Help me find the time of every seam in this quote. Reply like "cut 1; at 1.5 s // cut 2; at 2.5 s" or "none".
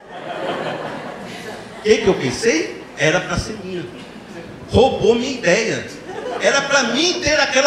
none